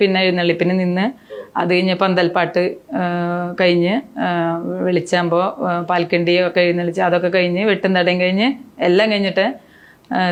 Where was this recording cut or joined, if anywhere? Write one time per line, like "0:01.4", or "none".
none